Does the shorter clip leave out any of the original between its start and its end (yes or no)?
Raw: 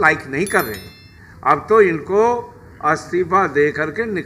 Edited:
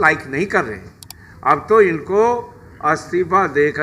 no